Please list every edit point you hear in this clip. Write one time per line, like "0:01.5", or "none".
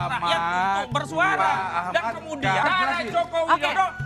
0:02.6

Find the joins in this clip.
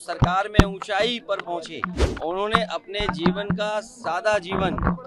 0:02.0

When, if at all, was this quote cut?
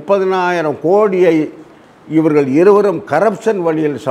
none

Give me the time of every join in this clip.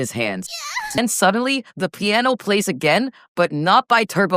0:01.0

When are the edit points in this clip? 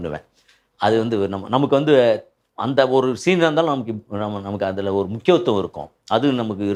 none

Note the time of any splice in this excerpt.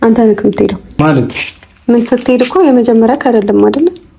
0:01.0

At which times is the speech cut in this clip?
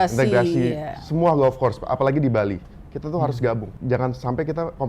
0:03.7

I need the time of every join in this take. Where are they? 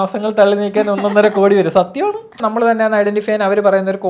0:02.4

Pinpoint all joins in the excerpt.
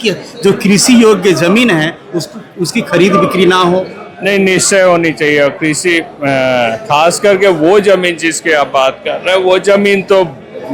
none

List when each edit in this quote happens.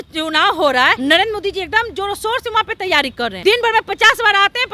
0:01.0
0:03.4

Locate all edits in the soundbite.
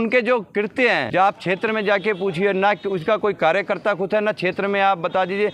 0:01.1

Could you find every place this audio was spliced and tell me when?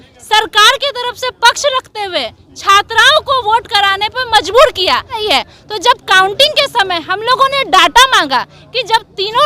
0:05.2

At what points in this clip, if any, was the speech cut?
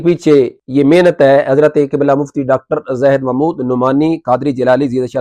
none

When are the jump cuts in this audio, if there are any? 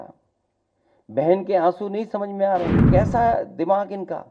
0:02.9

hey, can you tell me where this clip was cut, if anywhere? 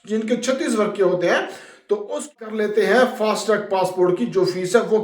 0:02.4

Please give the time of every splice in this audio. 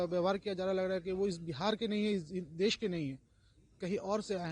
none

